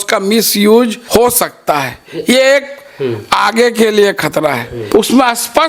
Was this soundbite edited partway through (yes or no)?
yes